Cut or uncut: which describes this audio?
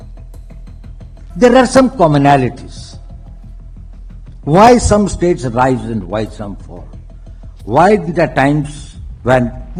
uncut